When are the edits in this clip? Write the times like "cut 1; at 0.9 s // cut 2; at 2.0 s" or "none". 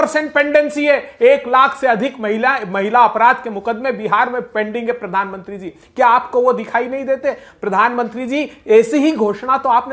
none